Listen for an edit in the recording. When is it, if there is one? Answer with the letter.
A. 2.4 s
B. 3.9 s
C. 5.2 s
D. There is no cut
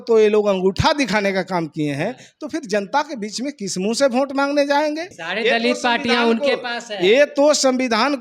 C